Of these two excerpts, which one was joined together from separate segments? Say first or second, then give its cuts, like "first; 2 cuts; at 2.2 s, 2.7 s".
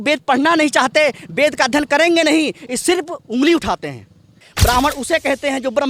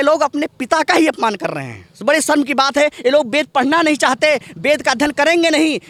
first; 1 cut; at 4.5 s